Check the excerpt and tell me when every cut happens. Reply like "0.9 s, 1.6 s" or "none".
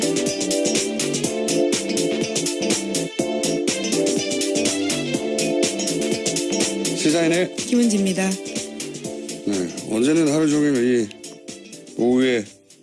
3.7 s